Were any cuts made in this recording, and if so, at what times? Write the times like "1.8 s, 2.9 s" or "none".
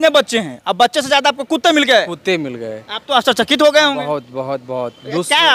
none